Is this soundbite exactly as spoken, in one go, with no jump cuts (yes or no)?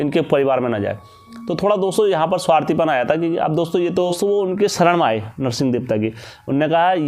no